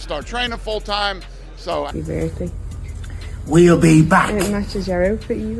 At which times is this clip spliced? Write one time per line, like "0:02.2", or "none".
0:01.7